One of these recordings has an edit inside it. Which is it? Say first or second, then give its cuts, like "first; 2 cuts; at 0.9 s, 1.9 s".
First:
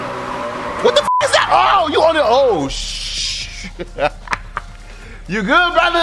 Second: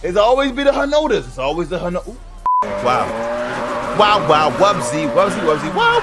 second; 1 cut; at 2.6 s